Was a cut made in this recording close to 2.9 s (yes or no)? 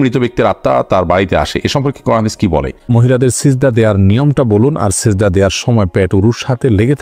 yes